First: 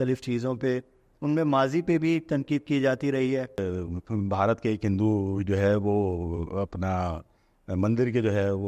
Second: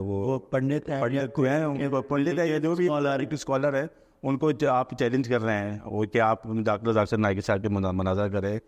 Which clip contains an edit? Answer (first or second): first